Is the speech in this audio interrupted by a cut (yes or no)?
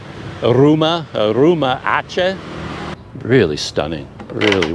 yes